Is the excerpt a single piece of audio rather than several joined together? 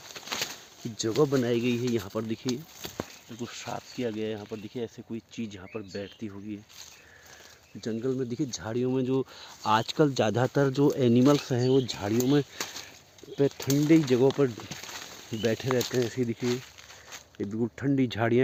yes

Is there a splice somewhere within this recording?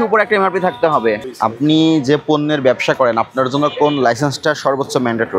yes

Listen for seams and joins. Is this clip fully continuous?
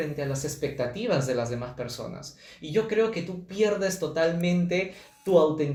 yes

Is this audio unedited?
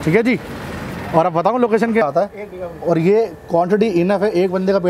no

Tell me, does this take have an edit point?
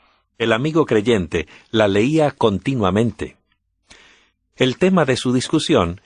yes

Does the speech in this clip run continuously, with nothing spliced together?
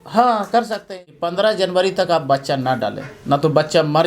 no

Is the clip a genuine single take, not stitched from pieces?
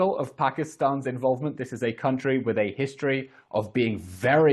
yes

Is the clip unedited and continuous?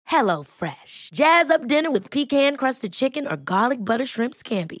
yes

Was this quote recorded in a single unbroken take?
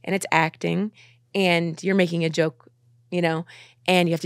yes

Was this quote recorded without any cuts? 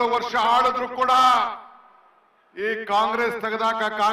yes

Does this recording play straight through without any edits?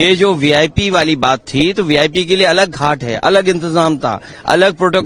yes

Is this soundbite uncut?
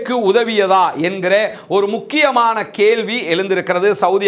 yes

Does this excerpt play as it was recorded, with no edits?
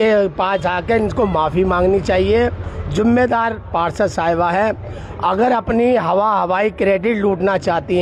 yes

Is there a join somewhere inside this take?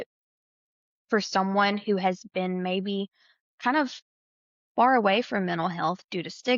no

